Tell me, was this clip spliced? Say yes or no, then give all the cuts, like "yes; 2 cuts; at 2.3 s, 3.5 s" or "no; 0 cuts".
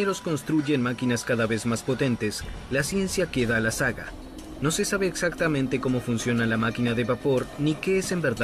yes; 1 cut; at 6.9 s